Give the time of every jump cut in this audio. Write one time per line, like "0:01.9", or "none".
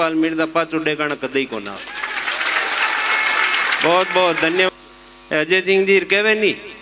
0:04.7